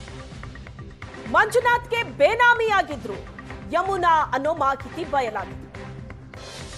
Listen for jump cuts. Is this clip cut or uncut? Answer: cut